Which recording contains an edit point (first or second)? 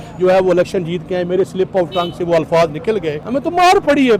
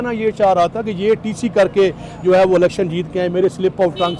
first